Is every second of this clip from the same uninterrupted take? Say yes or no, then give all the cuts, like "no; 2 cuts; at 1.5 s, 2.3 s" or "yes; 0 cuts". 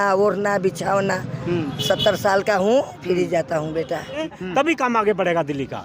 no; 1 cut; at 4.2 s